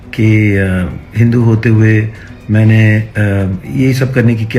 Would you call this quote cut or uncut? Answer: uncut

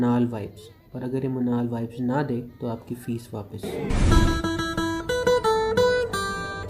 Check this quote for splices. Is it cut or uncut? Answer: uncut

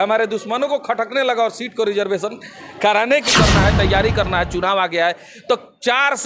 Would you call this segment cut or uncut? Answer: cut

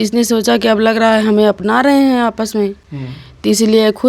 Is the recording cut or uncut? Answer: uncut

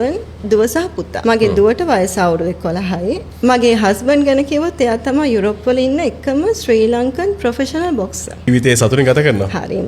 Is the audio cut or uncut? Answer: cut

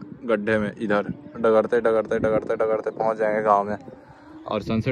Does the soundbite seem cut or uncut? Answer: uncut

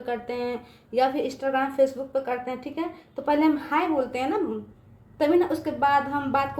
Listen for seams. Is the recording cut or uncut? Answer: uncut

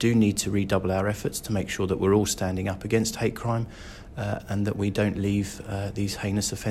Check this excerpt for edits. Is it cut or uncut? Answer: uncut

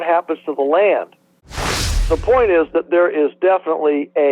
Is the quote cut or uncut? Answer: cut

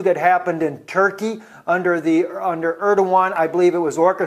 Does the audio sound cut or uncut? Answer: cut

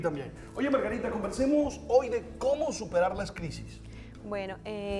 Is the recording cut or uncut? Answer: cut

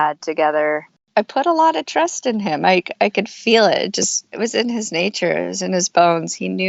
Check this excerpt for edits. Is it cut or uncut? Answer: cut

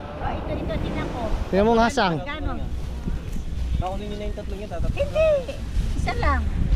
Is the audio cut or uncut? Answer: uncut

